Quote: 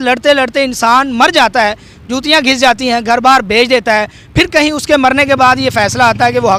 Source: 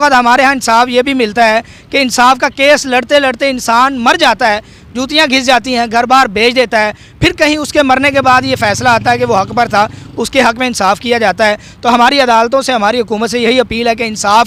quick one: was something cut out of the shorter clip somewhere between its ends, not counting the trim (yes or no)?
no